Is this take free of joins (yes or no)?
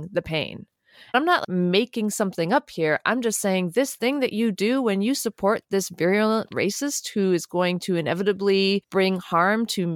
no